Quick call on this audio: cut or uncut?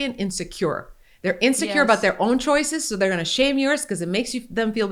uncut